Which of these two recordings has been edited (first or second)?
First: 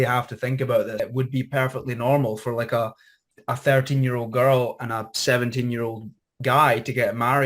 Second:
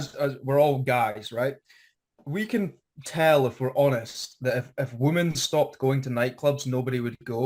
first